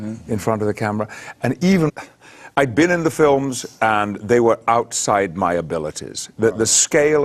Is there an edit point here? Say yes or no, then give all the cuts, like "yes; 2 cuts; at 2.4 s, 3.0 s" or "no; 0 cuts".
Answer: no; 0 cuts